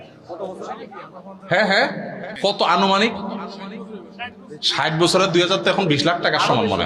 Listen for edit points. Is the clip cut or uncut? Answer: cut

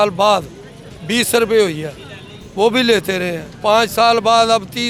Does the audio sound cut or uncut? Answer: uncut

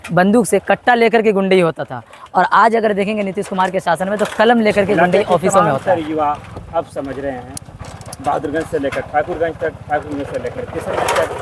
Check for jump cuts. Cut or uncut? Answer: cut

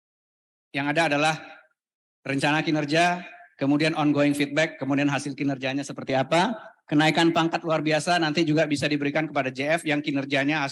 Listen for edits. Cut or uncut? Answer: uncut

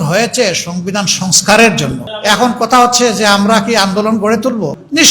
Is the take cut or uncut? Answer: cut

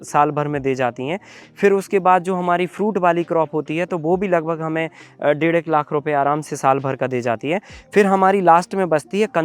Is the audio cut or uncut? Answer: uncut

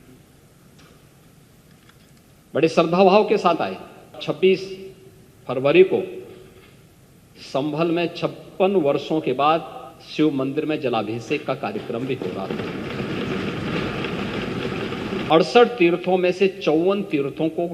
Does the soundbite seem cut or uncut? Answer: cut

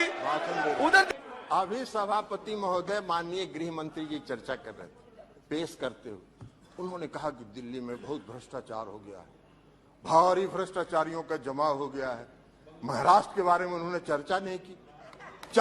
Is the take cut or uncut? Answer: cut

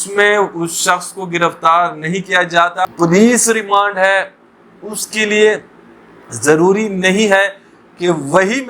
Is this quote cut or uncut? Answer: cut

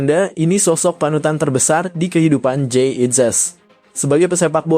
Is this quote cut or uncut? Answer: uncut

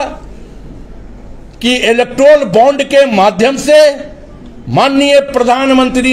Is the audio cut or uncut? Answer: uncut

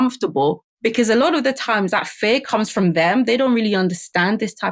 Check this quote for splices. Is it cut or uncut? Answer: uncut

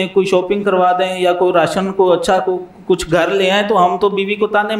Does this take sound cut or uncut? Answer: uncut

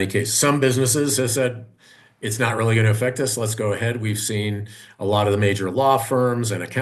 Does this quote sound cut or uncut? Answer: uncut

